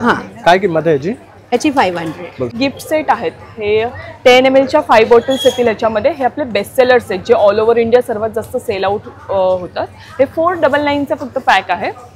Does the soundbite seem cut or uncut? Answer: cut